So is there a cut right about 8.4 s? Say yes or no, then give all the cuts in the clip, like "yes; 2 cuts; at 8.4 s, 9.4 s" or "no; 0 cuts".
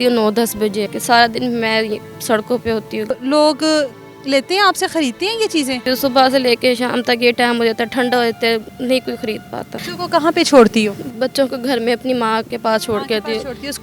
no; 5 cuts; at 0.9 s, 3.1 s, 5.8 s, 9.9 s, 12.5 s